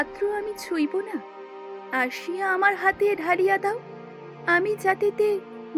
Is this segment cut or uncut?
uncut